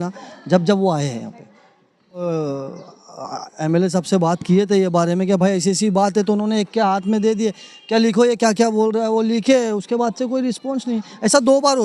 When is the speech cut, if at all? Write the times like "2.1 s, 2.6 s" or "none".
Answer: 2.2 s